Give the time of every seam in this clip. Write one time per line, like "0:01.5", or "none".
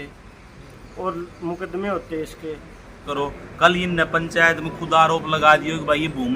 0:03.0